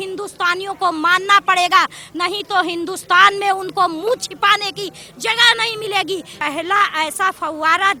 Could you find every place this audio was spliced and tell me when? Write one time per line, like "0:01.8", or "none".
0:06.3